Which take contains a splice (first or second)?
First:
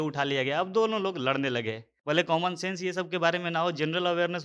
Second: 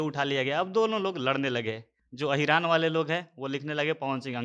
first